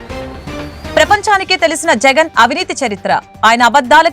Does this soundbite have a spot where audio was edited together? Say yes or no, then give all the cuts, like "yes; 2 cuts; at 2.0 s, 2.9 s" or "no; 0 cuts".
yes; 1 cut; at 0.9 s